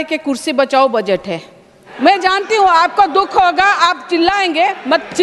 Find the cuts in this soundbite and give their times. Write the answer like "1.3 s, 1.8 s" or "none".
1.8 s